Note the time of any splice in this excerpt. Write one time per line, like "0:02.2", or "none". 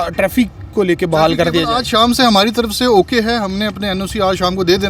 none